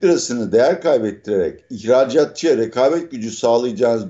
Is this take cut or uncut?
cut